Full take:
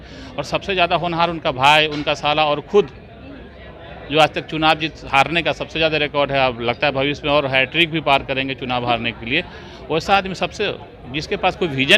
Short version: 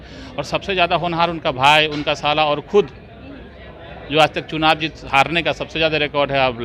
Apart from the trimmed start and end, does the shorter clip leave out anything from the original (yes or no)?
no